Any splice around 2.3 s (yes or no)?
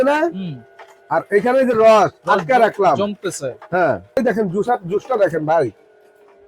no